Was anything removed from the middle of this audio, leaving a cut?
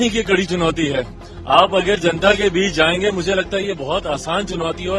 no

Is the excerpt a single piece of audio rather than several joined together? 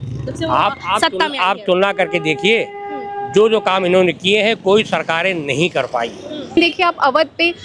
no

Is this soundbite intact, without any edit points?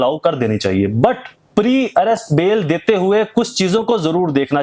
no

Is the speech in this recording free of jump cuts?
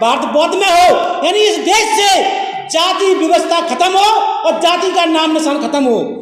yes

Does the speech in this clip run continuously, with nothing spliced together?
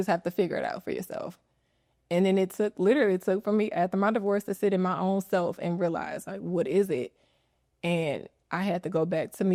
yes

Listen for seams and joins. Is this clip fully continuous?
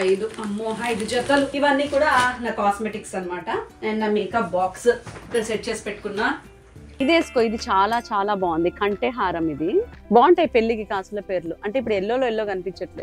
no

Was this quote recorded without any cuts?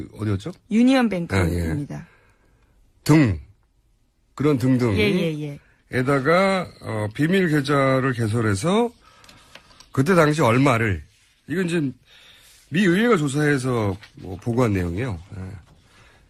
yes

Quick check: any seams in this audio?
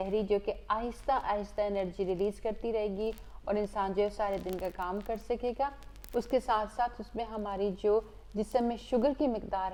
no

